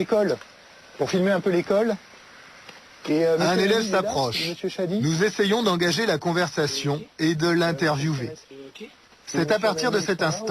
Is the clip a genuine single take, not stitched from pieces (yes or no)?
no